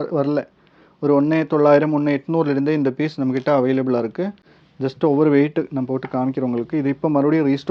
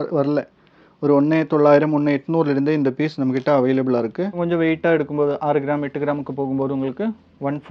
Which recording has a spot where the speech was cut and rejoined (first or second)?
second